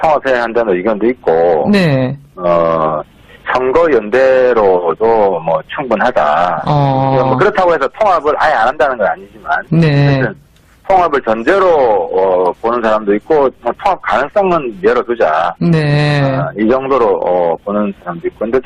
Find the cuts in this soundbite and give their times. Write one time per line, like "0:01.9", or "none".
none